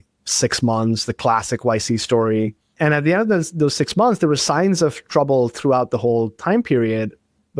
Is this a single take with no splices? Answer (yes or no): no